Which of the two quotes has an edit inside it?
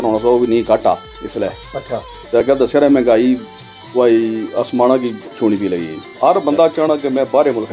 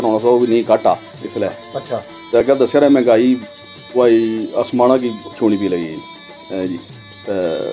first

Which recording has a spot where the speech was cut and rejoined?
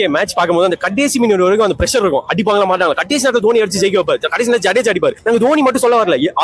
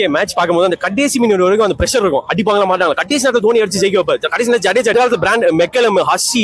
second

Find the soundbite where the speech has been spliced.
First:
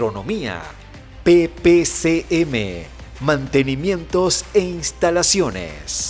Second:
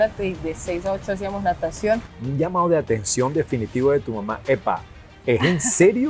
second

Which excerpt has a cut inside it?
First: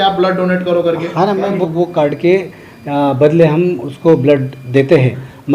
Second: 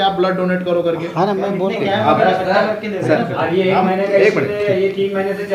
first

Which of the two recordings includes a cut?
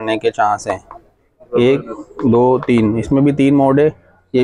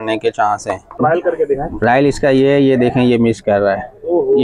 second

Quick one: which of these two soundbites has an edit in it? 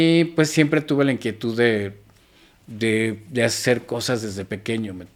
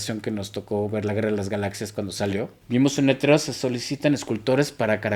second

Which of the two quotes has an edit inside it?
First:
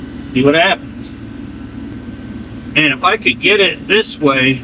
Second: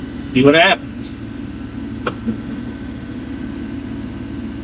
first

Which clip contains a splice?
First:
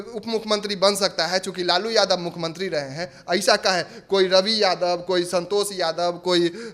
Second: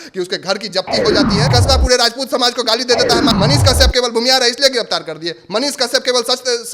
second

